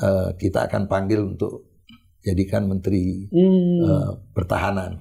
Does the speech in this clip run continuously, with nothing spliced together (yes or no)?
yes